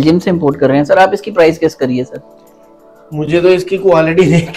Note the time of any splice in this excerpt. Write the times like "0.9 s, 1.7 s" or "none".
none